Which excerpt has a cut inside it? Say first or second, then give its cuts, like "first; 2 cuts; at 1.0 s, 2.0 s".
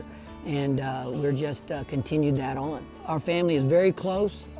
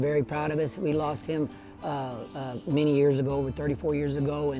first; 1 cut; at 3.0 s